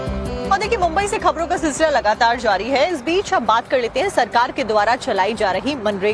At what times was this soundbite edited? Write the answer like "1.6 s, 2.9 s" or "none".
1.7 s